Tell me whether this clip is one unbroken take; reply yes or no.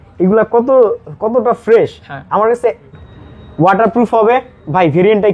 no